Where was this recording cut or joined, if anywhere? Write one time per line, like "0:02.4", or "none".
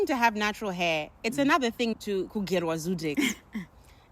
0:02.0